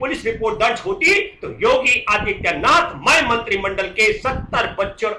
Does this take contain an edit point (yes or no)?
no